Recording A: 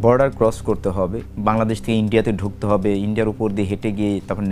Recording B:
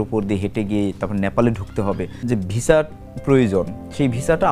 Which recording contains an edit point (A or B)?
B